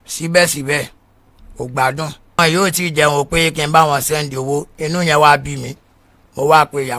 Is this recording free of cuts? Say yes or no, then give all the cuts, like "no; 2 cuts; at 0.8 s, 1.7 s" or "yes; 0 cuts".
no; 1 cut; at 2.4 s